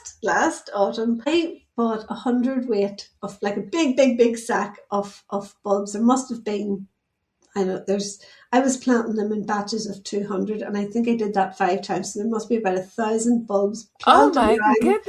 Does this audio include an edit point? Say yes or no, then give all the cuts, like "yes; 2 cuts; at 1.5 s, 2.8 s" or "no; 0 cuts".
yes; 1 cut; at 1.3 s